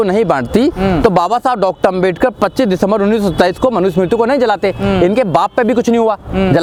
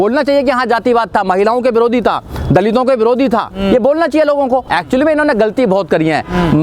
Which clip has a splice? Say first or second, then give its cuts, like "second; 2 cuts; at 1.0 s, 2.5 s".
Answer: second; 1 cut; at 4.7 s